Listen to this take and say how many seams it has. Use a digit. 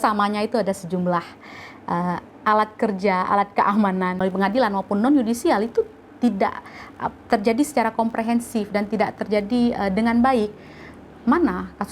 1